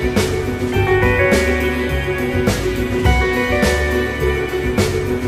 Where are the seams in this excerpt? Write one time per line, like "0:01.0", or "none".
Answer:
none